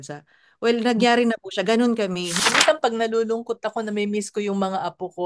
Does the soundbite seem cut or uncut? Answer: cut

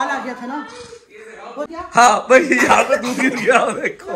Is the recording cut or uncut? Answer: uncut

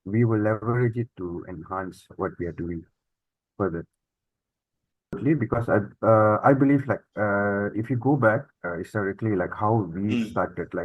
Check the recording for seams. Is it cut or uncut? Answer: cut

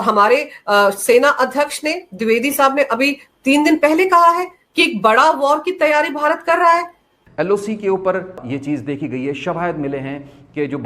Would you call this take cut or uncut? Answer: cut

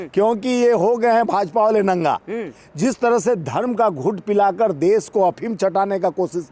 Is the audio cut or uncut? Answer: uncut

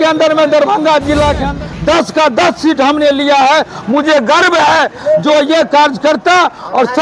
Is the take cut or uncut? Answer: cut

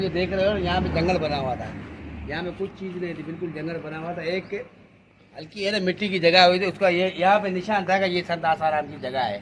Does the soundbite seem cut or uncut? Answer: uncut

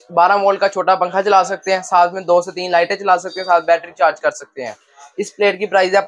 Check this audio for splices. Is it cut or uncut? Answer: uncut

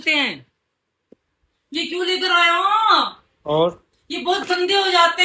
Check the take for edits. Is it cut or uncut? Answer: uncut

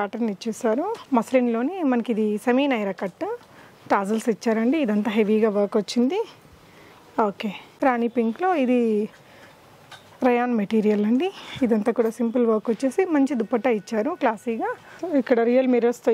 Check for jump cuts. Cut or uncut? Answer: cut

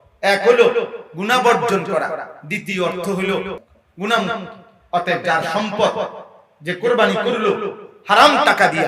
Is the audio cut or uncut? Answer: cut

